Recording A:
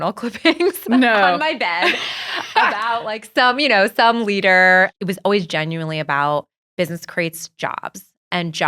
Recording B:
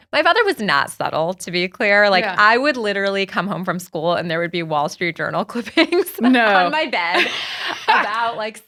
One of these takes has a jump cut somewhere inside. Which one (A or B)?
A